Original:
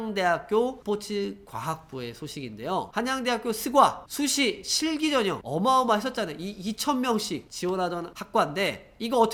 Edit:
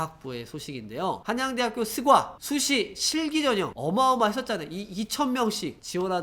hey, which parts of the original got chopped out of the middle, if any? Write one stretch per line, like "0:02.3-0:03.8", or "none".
none